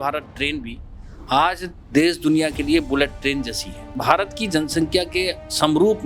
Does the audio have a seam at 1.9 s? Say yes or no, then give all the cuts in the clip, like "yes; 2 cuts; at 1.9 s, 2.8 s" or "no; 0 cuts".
no; 1 cut; at 3.9 s